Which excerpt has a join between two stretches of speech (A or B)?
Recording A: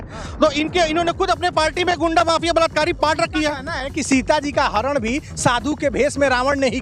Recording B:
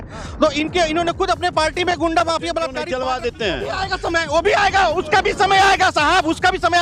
B